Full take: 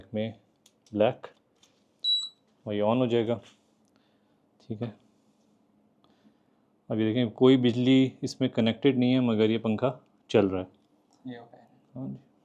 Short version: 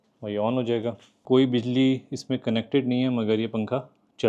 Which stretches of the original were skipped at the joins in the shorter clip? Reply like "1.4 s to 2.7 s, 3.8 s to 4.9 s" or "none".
3.7 s to 7.3 s